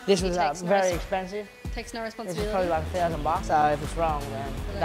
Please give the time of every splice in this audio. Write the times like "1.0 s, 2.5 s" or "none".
none